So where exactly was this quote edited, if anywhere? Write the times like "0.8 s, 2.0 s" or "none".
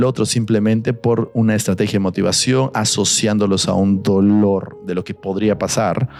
none